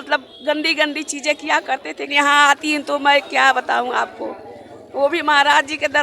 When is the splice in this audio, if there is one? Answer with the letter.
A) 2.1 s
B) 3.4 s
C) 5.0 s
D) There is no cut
A